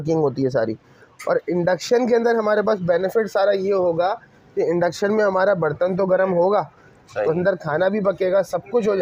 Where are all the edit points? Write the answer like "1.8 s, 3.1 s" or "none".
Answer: none